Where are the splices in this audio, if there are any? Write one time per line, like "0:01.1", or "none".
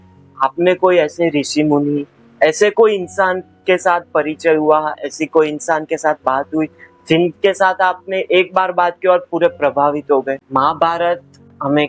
0:10.4